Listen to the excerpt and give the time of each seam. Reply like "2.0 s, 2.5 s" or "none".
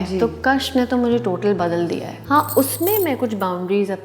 2.1 s